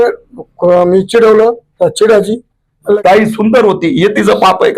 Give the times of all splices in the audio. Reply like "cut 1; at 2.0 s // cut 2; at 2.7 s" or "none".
cut 1; at 3.0 s